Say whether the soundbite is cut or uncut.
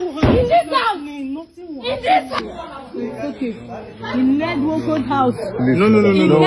uncut